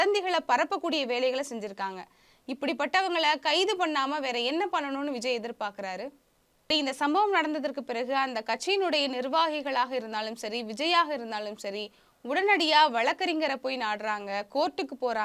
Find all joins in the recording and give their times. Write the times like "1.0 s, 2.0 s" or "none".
6.7 s

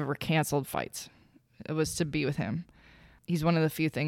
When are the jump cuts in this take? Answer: 3.1 s

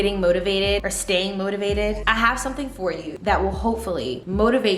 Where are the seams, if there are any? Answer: 0.9 s, 2.0 s, 3.1 s

